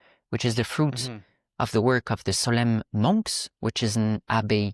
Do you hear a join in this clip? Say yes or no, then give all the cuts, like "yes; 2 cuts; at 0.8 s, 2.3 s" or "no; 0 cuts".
no; 0 cuts